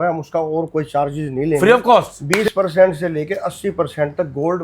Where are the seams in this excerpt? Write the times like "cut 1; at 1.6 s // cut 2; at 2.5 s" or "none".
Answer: cut 1; at 2.2 s